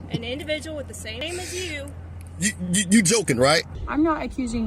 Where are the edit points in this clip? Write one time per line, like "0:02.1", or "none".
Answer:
0:02.7
0:03.8